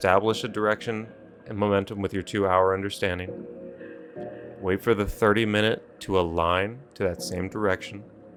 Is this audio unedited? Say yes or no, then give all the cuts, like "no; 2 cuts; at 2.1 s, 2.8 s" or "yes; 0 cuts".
yes; 0 cuts